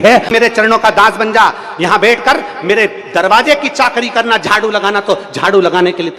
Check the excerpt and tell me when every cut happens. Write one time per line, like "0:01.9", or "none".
none